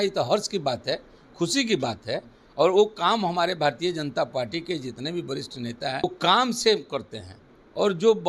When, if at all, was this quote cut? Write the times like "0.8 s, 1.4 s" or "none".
6.0 s